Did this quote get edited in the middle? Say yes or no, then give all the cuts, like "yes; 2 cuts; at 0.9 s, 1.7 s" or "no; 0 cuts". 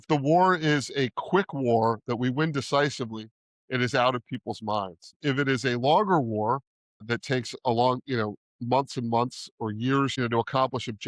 yes; 3 cuts; at 5.2 s, 7.1 s, 10.2 s